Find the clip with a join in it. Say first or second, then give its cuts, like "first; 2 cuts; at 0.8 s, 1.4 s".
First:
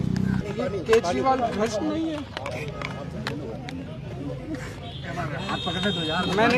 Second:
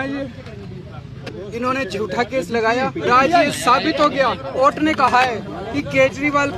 second; 4 cuts; at 1.3 s, 3.1 s, 4.6 s, 5.6 s